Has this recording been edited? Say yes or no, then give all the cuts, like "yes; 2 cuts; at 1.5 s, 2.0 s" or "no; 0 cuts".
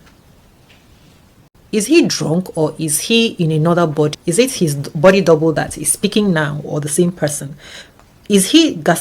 yes; 2 cuts; at 1.5 s, 4.2 s